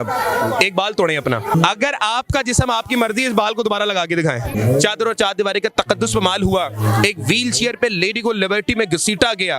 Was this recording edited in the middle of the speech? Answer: yes; 2 cuts; at 1.6 s, 4.5 s

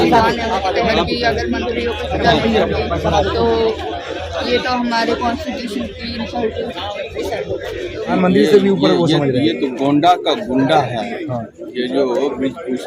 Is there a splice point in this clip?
yes; 1 cut; at 8.2 s

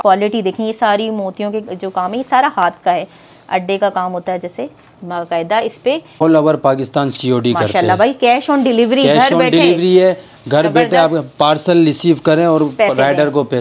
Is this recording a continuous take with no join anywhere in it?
no; 1 cut; at 6.2 s

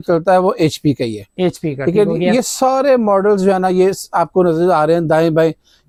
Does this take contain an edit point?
no; 0 cuts

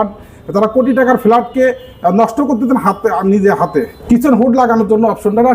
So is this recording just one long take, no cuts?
no; 1 cut; at 4.1 s

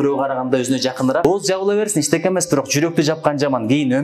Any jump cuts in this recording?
yes; 1 cut; at 1.2 s

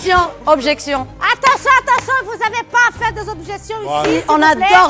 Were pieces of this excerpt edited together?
no; 0 cuts

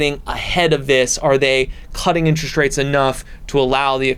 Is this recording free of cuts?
yes; 0 cuts

